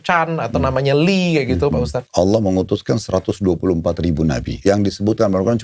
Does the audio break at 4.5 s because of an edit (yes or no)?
yes